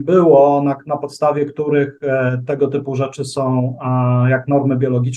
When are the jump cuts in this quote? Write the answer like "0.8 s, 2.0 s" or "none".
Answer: none